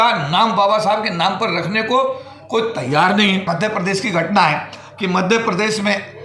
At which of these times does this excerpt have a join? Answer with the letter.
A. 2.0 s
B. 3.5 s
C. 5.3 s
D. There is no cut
B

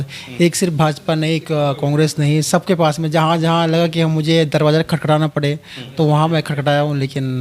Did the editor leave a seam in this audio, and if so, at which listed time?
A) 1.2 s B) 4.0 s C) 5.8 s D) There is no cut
D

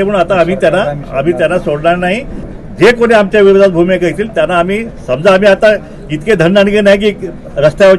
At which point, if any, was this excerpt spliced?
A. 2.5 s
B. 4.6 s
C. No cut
A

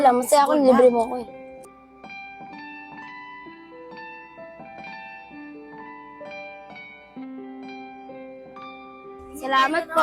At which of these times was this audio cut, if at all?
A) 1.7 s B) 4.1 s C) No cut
A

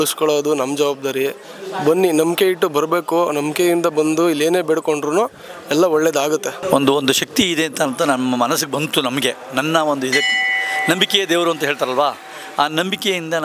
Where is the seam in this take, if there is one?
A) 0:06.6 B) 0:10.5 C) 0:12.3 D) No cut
A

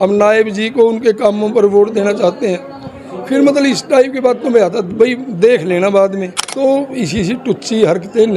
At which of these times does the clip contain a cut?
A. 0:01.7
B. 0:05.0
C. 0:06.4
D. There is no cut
C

